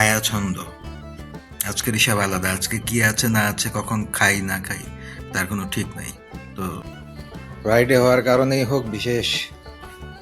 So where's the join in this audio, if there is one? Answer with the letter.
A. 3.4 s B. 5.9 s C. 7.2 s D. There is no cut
C